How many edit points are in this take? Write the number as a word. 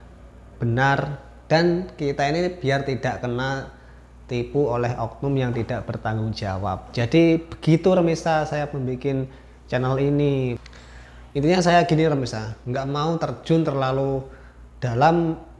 one